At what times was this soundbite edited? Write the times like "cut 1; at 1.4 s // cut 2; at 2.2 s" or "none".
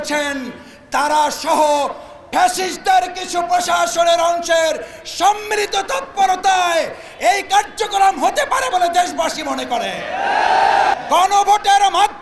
cut 1; at 10.9 s